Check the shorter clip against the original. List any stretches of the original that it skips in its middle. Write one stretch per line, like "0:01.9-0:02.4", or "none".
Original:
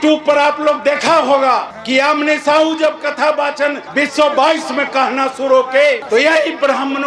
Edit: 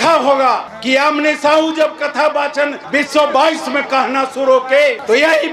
none